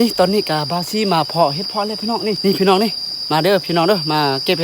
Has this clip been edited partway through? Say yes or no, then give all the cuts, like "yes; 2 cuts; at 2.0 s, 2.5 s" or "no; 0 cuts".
yes; 1 cut; at 2.4 s